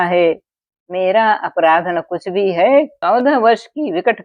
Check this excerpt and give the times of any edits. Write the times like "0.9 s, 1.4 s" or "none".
2.9 s